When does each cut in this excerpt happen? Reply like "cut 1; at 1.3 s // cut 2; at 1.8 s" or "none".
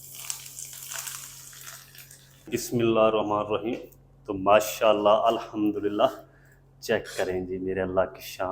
cut 1; at 2.5 s